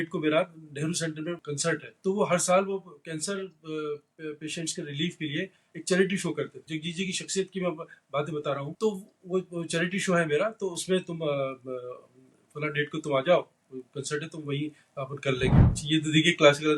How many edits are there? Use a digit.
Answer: 4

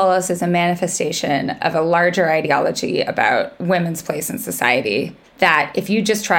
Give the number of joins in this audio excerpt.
1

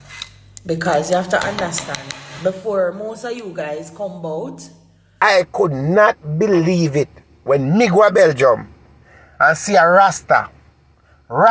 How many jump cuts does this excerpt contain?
1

